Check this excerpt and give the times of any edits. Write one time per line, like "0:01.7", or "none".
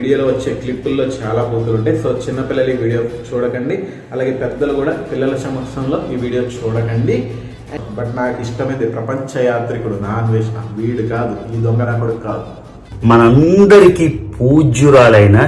0:07.7

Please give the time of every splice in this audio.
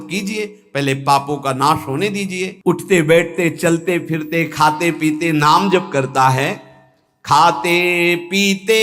0:02.5

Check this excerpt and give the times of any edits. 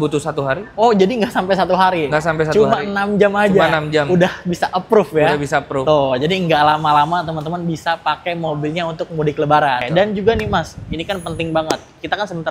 0:09.8

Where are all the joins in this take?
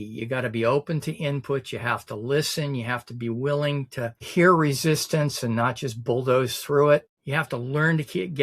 0:04.2
0:07.2

